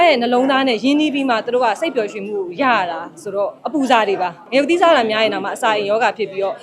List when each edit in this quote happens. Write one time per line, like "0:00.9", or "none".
0:04.4

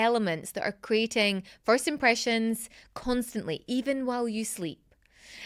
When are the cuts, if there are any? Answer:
none

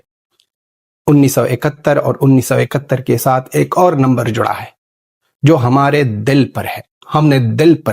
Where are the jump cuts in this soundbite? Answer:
none

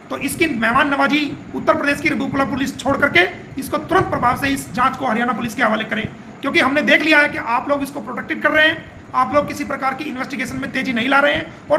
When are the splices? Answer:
none

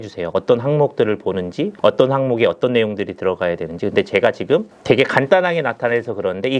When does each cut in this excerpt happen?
0:01.7
0:04.7

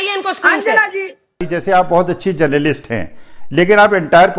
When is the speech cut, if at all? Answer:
0:01.5

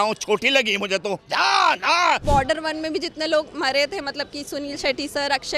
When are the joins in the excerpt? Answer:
0:01.2
0:02.2

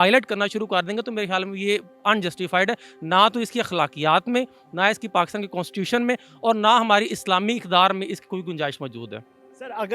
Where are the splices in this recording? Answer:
none

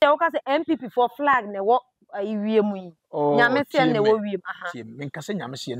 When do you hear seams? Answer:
none

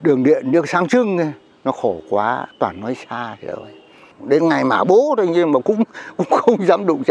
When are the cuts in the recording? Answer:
0:04.1

